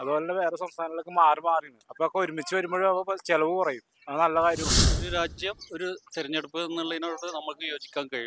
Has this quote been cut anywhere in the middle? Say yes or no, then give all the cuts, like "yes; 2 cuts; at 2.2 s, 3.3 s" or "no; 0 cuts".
yes; 1 cut; at 5.0 s